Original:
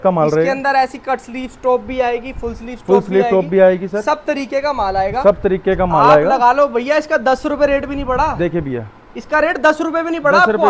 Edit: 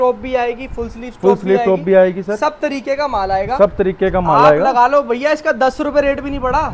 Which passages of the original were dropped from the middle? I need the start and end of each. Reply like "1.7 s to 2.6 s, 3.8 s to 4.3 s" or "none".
none